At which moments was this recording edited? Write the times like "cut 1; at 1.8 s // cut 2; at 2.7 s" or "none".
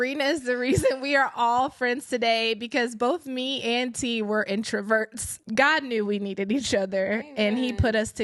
cut 1; at 5.4 s